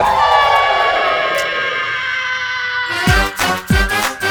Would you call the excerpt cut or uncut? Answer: uncut